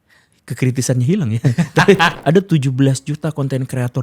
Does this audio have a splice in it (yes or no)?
yes